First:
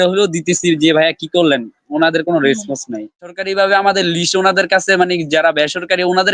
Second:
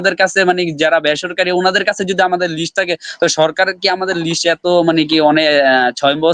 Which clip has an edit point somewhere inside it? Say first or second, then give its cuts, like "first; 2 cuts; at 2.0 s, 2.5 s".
first; 1 cut; at 3.3 s